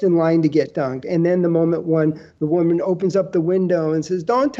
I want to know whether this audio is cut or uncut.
uncut